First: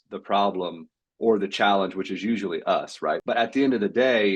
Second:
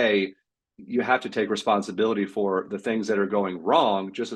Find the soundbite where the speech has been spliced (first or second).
first